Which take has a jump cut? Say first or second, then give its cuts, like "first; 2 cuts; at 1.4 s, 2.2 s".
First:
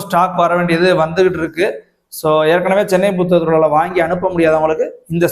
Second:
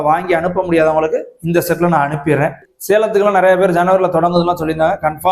second; 1 cut; at 2.7 s